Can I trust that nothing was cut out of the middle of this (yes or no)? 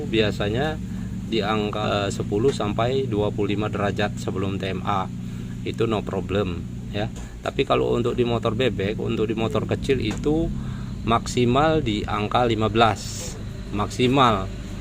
no